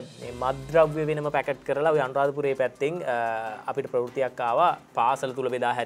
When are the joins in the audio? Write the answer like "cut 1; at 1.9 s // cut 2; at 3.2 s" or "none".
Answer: none